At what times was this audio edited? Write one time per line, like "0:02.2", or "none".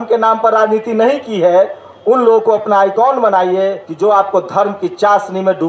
0:03.8